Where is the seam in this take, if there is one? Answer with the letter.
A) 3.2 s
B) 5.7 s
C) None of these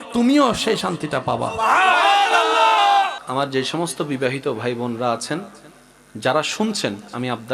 A